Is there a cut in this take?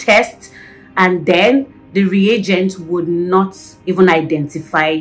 no; 0 cuts

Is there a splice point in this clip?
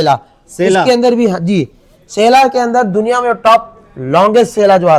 no; 0 cuts

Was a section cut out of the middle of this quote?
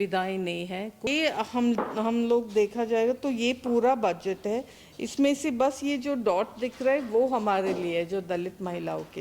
yes; 1 cut; at 1.1 s

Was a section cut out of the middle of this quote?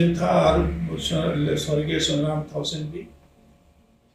no; 0 cuts

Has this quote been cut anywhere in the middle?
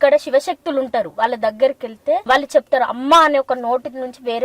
yes; 1 cut; at 2.2 s

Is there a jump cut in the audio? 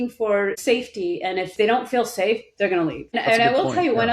yes; 1 cut; at 1.5 s

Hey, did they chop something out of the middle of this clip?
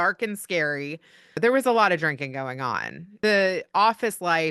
yes; 2 cuts; at 1.4 s, 3.2 s

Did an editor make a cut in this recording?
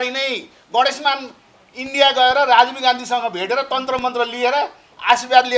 no; 0 cuts

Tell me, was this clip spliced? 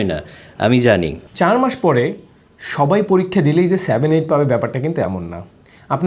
yes; 1 cut; at 1.2 s

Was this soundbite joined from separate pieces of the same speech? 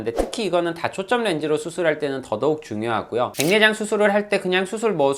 yes; 1 cut; at 3.3 s

